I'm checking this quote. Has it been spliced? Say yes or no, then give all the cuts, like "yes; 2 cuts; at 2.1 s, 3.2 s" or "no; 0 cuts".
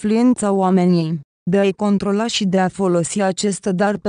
no; 0 cuts